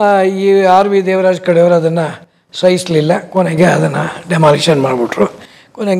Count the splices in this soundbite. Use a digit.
0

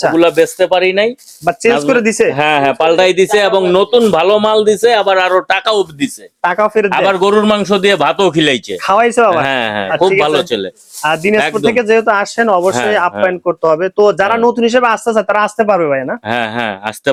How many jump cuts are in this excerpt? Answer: 0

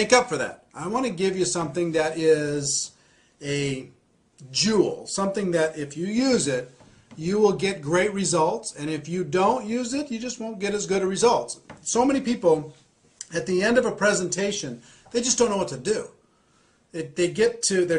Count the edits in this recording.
1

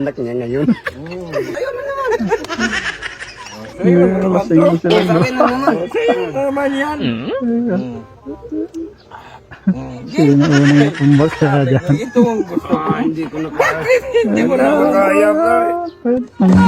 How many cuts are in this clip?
1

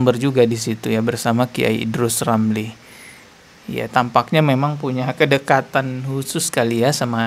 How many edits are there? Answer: 0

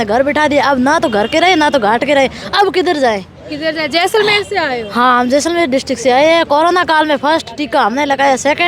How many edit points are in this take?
0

